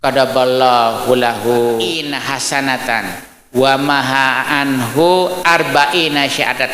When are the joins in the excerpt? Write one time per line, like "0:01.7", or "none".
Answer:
0:02.1